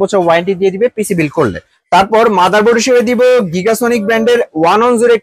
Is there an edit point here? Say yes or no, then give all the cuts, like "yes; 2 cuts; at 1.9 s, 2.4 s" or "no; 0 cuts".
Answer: no; 0 cuts